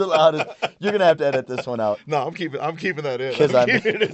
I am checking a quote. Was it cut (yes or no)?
no